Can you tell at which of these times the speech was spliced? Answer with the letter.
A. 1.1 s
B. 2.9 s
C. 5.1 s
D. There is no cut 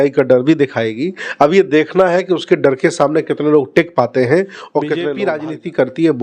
C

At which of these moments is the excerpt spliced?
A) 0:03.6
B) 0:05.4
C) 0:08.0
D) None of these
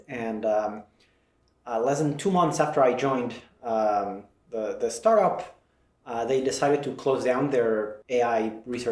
C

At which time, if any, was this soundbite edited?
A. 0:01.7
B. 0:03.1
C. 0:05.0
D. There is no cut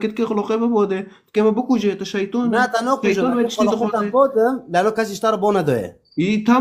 D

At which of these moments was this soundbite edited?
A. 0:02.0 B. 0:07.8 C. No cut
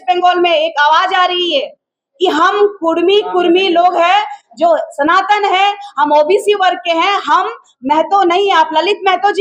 C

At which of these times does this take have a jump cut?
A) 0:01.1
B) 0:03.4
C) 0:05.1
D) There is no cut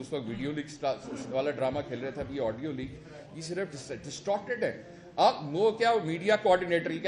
D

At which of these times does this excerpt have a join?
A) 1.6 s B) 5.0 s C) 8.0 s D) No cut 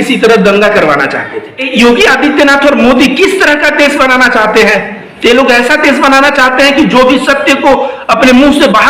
A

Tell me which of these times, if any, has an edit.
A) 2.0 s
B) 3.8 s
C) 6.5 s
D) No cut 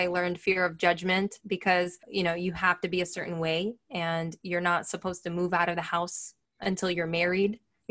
A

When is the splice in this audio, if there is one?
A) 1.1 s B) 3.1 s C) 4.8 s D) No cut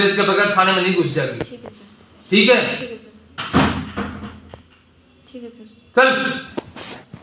D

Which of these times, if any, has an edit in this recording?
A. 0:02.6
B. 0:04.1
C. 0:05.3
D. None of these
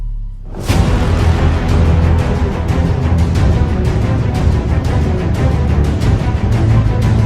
C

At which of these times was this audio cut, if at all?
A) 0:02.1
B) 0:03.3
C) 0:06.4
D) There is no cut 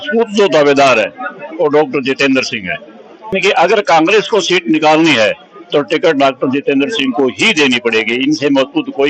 B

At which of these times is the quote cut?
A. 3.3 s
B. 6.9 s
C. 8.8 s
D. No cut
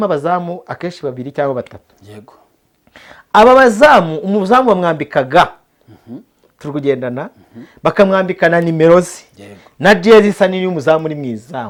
D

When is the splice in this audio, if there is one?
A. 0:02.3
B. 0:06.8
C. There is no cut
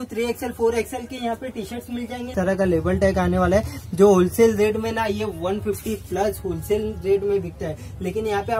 A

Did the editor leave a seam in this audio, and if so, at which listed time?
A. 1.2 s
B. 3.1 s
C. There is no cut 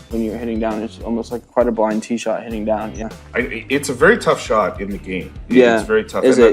B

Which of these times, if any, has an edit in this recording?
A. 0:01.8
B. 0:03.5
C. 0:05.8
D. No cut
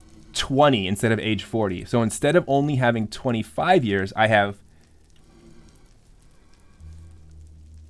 D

